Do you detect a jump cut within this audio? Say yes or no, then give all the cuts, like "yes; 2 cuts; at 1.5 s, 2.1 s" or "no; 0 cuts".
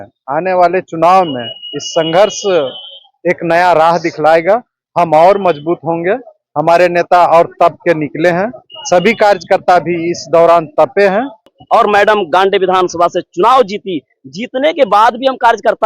yes; 1 cut; at 11.6 s